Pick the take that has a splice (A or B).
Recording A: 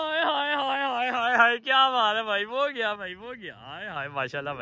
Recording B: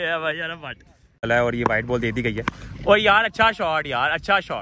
B